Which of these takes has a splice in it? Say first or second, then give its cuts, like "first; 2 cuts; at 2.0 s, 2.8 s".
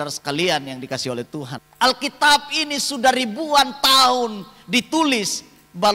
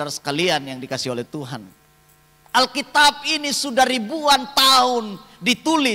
first; 1 cut; at 1.6 s